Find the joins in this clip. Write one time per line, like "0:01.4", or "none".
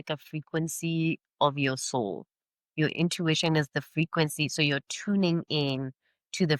none